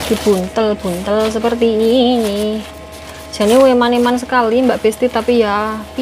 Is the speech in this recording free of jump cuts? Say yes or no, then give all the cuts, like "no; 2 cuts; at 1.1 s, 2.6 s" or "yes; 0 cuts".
yes; 0 cuts